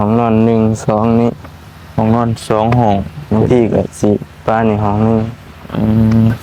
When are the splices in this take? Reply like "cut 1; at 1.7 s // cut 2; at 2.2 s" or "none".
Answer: none